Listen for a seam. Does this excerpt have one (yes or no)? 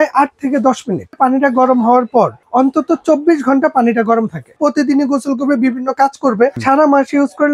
yes